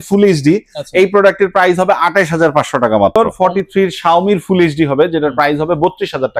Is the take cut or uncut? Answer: cut